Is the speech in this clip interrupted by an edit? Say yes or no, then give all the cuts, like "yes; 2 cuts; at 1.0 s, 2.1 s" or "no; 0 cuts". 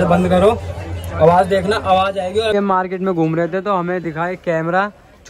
yes; 1 cut; at 2.5 s